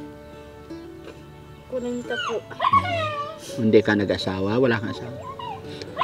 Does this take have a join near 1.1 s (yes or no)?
no